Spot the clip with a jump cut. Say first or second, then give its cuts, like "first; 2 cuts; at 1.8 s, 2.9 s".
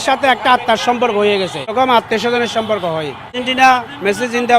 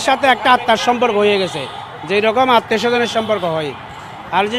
first; 2 cuts; at 1.7 s, 3.4 s